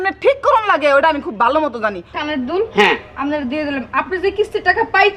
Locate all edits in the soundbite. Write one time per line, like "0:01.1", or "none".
0:01.9